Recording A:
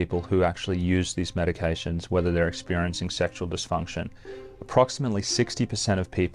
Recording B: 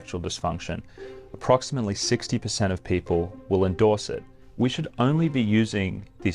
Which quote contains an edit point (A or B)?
B